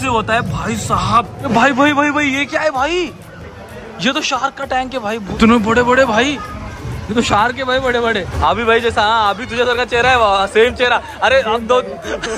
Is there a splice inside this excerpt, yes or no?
yes